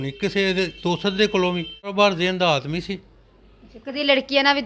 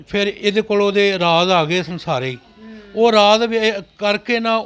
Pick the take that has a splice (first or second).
first